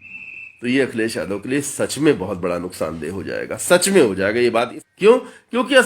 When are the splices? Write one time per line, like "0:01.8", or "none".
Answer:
0:04.8